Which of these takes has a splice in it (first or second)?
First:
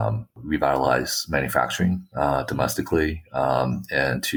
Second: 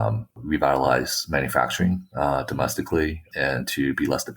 second